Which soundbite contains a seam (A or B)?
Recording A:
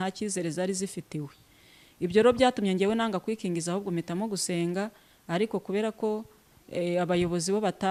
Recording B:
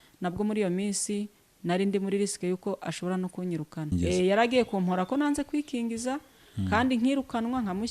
B